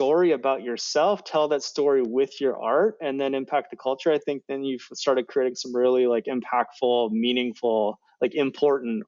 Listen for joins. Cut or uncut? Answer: uncut